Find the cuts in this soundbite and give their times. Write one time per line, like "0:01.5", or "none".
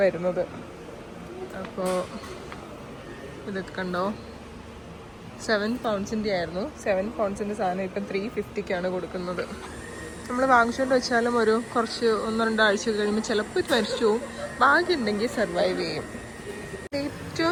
none